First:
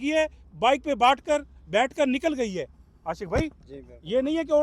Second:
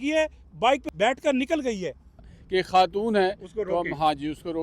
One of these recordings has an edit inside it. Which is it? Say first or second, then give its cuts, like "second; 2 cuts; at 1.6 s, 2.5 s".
second; 2 cuts; at 0.8 s, 2.3 s